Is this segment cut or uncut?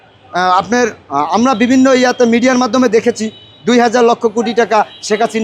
uncut